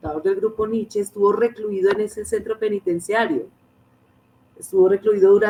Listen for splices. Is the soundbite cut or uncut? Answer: uncut